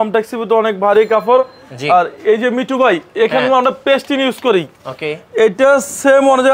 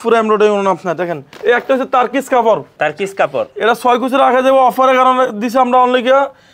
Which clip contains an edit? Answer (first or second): second